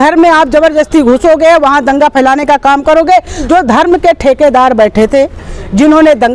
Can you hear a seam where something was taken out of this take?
yes; 1 cut; at 3.5 s

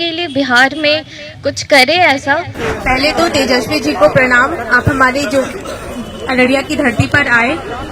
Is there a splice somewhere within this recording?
yes; 1 cut; at 2.7 s

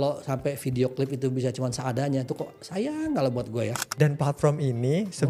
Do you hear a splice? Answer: yes; 1 cut; at 3.8 s

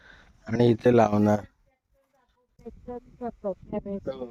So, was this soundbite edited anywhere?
yes; 1 cut; at 2.6 s

